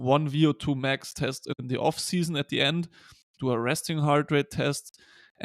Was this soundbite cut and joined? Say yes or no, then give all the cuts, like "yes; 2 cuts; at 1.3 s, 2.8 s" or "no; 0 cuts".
yes; 1 cut; at 1.5 s